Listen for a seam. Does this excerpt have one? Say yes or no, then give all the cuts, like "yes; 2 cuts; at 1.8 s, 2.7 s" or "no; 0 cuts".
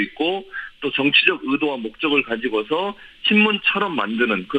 yes; 1 cut; at 1.1 s